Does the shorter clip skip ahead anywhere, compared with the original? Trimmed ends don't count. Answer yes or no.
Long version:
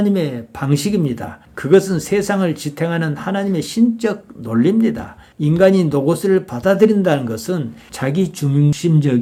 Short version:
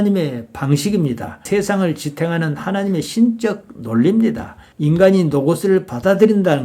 yes